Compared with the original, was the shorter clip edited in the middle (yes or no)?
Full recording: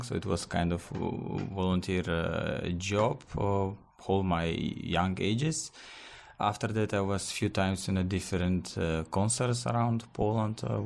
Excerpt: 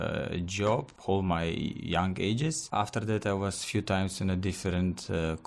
yes